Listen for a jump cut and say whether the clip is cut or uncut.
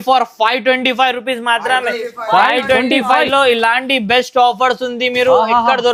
uncut